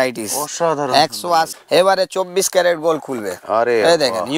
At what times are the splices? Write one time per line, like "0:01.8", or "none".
0:01.6